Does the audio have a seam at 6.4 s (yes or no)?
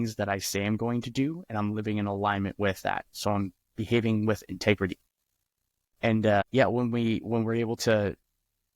yes